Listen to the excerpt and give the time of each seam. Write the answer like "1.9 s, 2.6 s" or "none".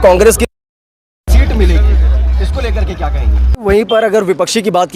3.6 s

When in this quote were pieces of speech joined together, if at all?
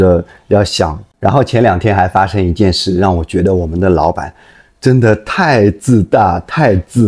1.1 s

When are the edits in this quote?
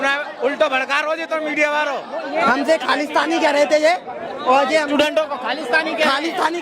2.4 s

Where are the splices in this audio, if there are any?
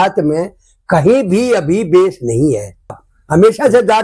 3.0 s

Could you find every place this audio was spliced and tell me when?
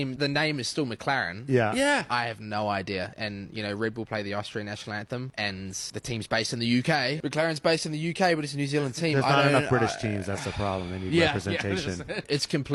none

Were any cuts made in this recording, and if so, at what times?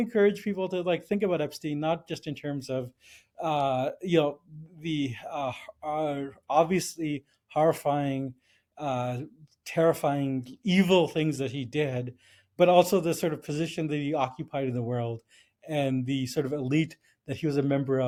none

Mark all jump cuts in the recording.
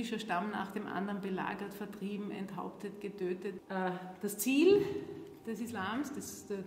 3.6 s

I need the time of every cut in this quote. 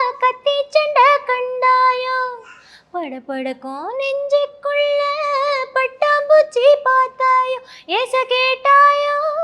none

